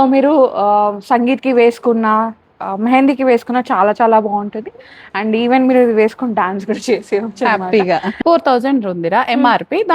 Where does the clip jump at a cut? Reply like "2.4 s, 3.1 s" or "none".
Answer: 8.1 s